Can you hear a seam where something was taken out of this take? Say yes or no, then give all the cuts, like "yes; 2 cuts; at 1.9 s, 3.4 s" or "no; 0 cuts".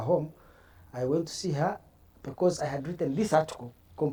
no; 0 cuts